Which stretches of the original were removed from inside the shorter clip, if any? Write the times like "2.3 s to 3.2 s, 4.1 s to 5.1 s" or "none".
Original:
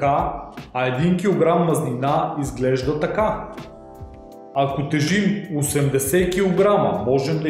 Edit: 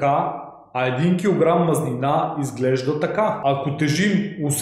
3.4 s to 4.5 s